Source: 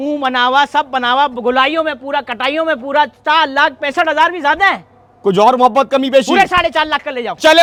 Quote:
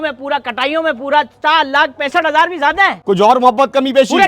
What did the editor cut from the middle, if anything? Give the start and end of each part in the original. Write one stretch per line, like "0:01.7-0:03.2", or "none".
0:04.8-0:05.1